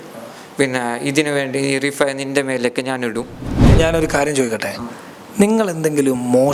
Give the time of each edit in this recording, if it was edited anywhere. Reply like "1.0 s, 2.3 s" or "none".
3.7 s